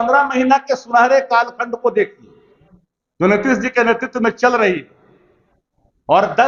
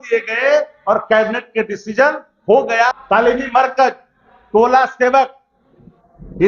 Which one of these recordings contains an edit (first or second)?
second